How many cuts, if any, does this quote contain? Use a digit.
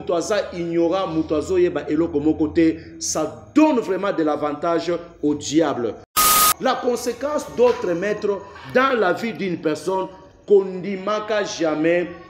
1